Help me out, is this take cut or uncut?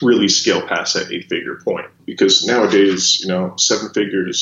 cut